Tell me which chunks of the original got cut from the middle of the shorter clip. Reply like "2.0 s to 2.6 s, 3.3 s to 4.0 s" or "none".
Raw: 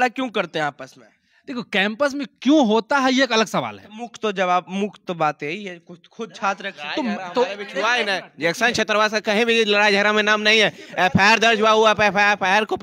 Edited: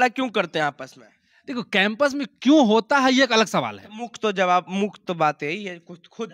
none